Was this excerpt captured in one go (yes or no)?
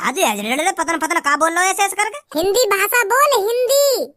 no